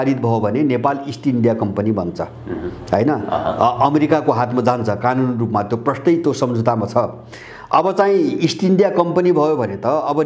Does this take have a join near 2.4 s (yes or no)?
no